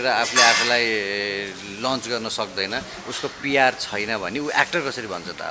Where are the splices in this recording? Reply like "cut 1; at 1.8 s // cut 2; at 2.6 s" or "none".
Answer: none